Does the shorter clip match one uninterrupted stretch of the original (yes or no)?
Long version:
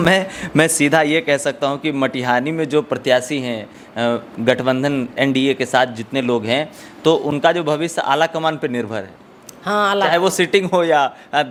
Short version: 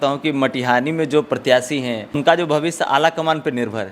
no